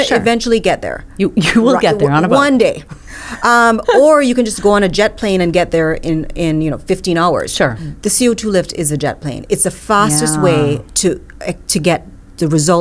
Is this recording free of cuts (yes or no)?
no